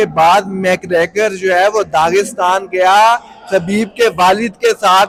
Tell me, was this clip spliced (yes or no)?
no